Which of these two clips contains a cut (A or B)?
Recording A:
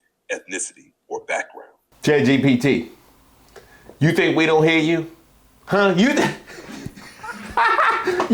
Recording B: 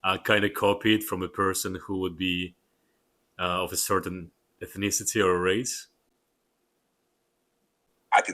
A